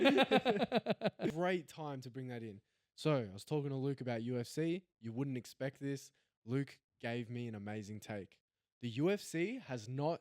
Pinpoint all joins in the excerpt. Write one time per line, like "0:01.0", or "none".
0:01.3